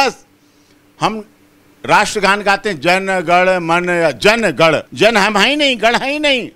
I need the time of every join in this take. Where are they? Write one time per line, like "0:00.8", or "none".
0:04.9

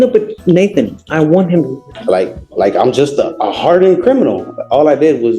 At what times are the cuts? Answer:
0:01.8

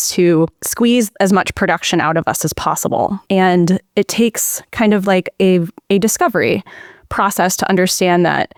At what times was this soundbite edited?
none

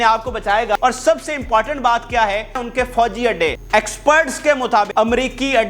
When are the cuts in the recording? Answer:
0:00.8
0:02.6
0:03.6
0:04.9

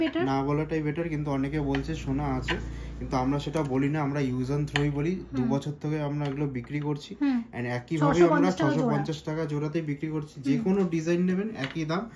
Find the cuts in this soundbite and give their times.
none

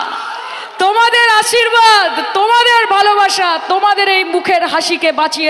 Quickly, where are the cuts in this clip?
none

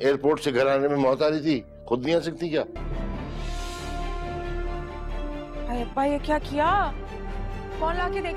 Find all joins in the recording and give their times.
0:02.8

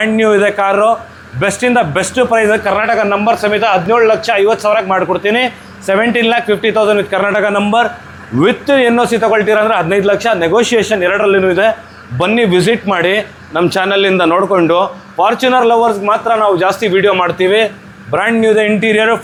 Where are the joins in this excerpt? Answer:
none

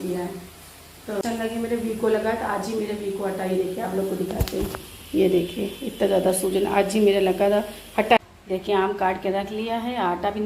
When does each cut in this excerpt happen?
0:01.2
0:08.2

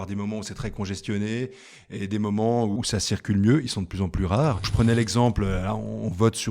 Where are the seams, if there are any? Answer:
0:02.8
0:04.7

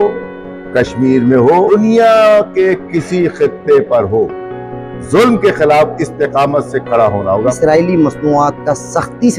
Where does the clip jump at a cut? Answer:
0:01.7
0:07.6

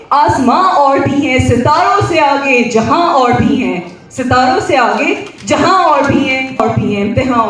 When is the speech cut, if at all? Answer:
0:06.6

